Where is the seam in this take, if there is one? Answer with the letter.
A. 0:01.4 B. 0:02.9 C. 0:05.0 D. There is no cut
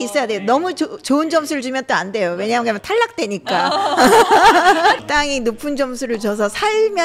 C